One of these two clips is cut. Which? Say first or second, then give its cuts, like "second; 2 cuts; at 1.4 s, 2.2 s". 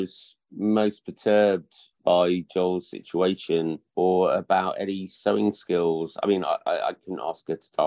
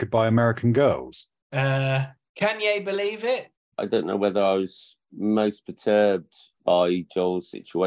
second; 2 cuts; at 2.2 s, 3.6 s